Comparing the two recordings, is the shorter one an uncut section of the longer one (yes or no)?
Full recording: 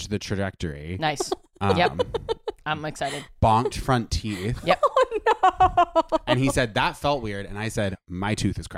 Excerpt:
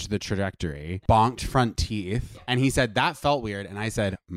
no